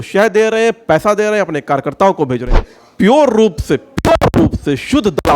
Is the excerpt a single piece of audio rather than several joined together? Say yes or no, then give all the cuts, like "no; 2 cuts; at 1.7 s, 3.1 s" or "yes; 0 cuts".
no; 1 cut; at 2.7 s